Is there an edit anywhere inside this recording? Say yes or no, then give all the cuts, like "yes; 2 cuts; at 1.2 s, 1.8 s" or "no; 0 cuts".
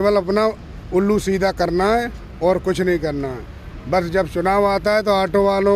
no; 0 cuts